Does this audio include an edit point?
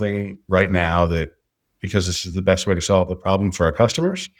no; 0 cuts

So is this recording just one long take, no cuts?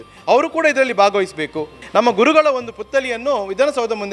no; 1 cut; at 1.8 s

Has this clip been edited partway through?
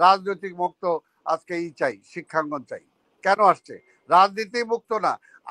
no; 0 cuts

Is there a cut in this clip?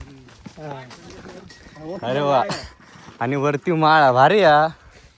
no; 0 cuts

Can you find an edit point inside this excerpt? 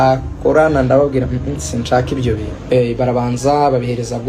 yes; 1 cut; at 2.5 s

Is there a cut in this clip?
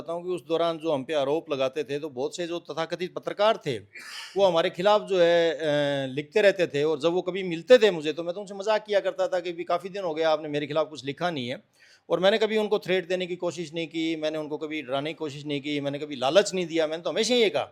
no; 0 cuts

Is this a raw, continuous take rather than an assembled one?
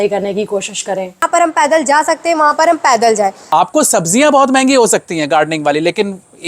no; 2 cuts; at 1.2 s, 3.4 s

